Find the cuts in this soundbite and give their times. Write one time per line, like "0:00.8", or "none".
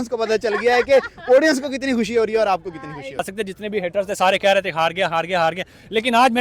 0:03.2